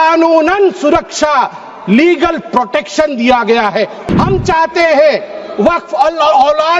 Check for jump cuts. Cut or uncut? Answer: cut